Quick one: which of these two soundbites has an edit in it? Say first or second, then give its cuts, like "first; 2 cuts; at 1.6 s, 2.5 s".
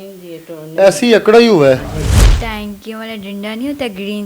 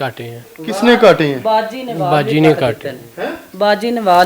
first; 1 cut; at 2.2 s